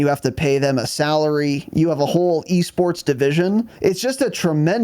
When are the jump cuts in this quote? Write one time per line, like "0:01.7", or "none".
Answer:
0:03.7